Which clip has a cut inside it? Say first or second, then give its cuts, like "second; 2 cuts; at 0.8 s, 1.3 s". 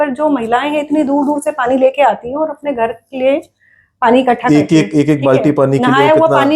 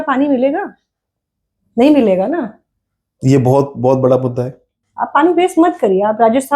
second; 1 cut; at 4.8 s